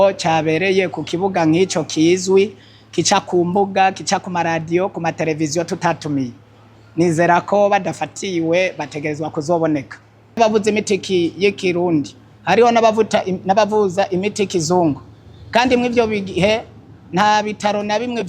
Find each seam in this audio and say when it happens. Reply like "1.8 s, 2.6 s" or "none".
10.2 s